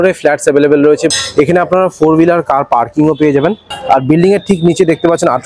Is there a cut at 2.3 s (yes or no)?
no